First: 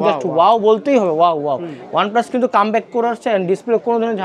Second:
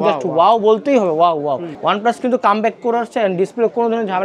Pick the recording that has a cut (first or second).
second